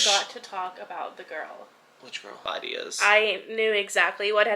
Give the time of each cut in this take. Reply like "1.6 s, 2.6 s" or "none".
2.4 s